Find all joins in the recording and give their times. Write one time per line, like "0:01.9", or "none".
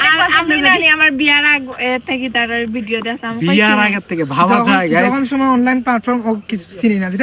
none